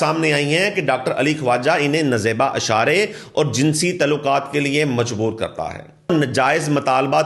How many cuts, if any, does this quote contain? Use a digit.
1